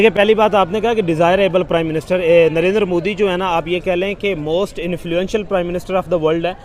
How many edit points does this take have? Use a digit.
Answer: 0